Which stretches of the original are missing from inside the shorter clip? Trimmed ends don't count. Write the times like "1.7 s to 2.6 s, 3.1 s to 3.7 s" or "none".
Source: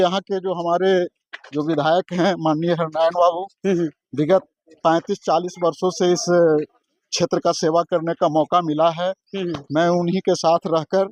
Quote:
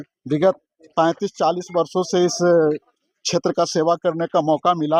none